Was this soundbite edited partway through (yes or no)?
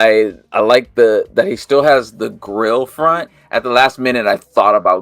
yes